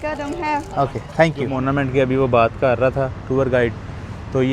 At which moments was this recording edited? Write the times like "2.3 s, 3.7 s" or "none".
1.5 s